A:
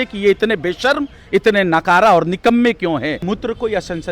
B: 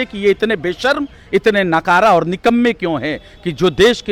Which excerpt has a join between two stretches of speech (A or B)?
A